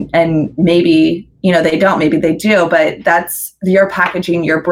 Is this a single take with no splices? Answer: yes; 0 cuts

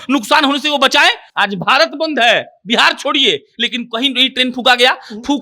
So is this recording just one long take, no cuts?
no; 1 cut; at 1.3 s

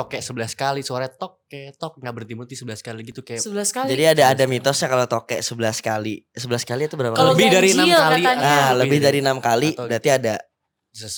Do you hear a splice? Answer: no; 0 cuts

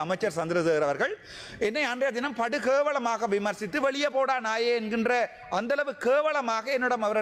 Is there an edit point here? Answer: no; 0 cuts

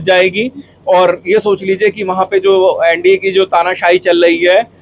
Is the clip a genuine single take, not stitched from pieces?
yes; 0 cuts

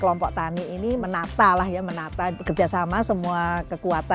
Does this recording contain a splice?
yes; 2 cuts; at 1.0 s, 2.4 s

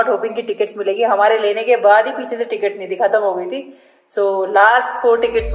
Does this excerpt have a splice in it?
no; 0 cuts

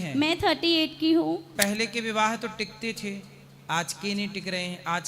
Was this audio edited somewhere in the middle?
yes; 1 cut; at 1.5 s

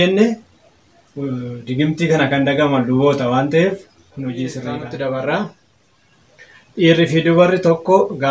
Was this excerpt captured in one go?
no; 1 cut; at 4.8 s

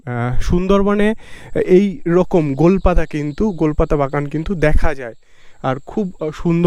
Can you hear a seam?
no; 0 cuts

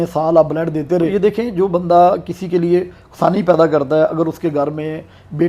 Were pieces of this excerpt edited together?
yes; 1 cut; at 1.1 s

